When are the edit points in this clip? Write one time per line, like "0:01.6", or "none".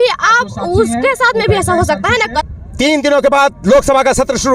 0:02.4

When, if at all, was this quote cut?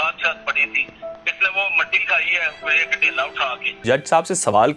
0:03.8

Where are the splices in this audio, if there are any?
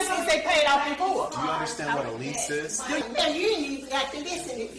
0:03.0

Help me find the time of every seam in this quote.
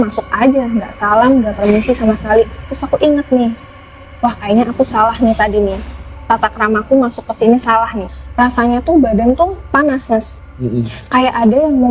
0:02.7
0:08.1

